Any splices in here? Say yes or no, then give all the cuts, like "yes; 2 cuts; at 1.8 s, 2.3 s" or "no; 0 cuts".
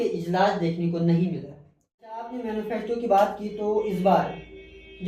yes; 1 cut; at 2.2 s